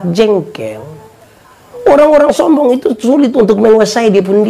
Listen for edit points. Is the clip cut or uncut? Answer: uncut